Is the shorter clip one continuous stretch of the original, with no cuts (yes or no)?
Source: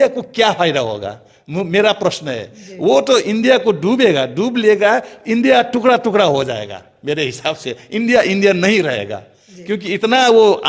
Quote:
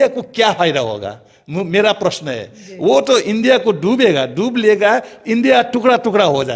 yes